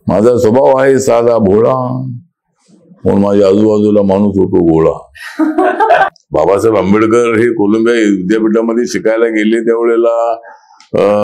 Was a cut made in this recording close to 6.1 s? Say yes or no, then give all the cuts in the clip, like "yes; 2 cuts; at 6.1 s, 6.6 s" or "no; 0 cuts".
yes; 1 cut; at 6.1 s